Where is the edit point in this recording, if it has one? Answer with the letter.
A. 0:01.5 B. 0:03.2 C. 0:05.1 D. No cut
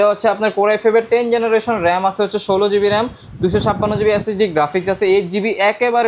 D